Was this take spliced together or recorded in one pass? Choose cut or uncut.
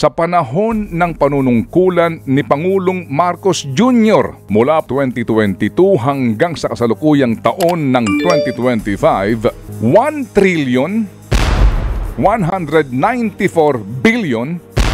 cut